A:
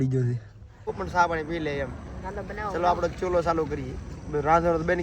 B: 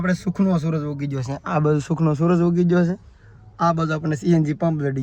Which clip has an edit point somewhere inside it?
A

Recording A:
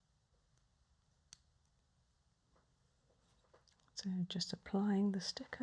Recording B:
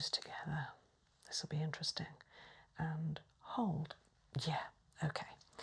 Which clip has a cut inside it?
A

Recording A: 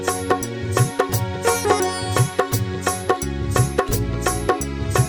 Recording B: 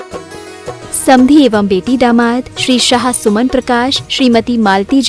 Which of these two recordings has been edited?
B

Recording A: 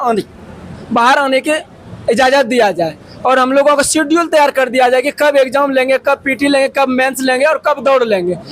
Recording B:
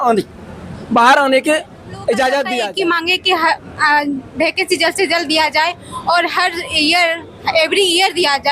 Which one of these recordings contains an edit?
B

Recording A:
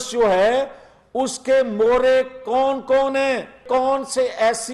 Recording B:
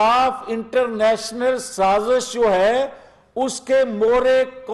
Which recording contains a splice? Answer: A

